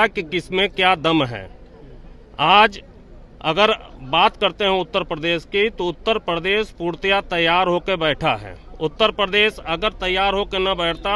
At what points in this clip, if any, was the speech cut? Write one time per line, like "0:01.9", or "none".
none